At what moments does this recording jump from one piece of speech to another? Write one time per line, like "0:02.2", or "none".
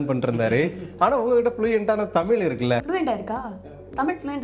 0:02.9